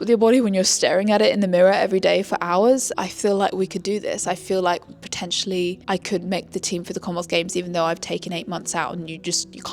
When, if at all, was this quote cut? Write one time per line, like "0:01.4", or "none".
0:02.9